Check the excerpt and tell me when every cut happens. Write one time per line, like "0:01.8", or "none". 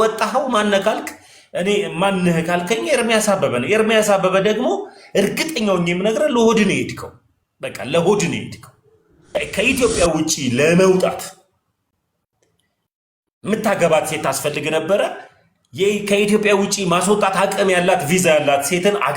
0:09.3

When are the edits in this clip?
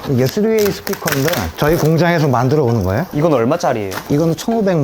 0:03.1
0:03.9

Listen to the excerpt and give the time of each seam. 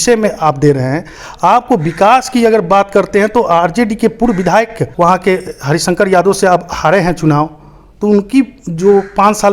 0:04.9

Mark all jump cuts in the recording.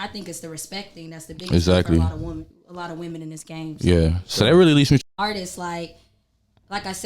0:05.0

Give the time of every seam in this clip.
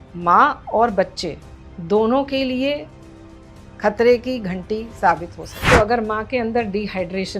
0:05.6

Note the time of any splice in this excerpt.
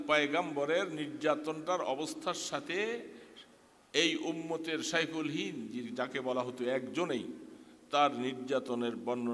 none

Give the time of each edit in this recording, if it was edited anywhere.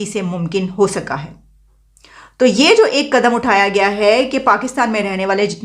none

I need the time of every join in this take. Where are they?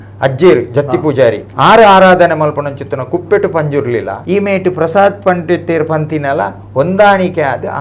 0:01.5
0:04.1

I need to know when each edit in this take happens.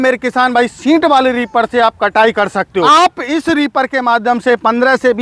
0:02.8

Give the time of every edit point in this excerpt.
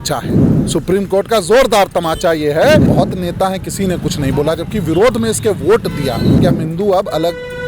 0:02.9
0:06.4

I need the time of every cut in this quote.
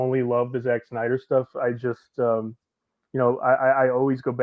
none

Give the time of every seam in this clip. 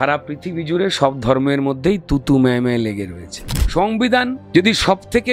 0:03.5
0:04.4

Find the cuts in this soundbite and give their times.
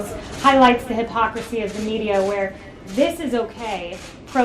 none

